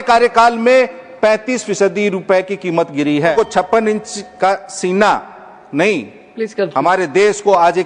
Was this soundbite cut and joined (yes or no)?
yes